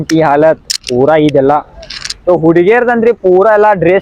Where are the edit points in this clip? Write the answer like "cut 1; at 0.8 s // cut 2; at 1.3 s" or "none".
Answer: cut 1; at 2.1 s